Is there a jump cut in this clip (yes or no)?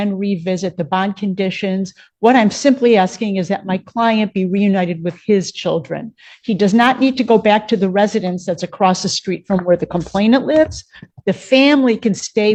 no